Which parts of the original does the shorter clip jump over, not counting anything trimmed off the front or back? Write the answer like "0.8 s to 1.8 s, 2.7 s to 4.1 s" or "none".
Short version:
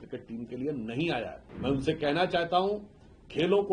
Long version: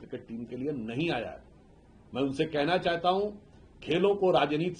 1.4 s to 2.0 s